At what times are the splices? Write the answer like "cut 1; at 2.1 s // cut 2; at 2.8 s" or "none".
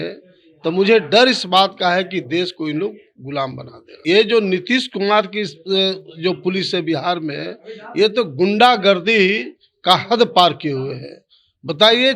cut 1; at 3.9 s